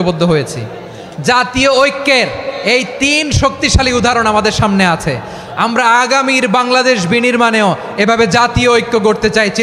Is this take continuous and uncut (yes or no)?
yes